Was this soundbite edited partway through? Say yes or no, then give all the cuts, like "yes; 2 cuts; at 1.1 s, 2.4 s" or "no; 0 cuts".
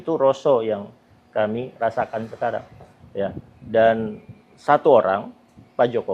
no; 0 cuts